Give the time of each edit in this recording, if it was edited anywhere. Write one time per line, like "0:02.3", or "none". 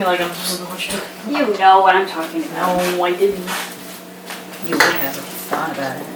none